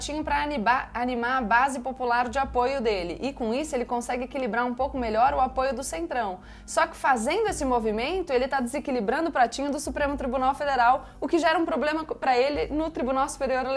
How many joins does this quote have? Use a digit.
0